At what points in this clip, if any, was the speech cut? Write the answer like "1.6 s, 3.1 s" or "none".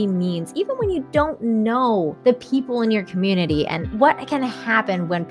2.1 s, 3.8 s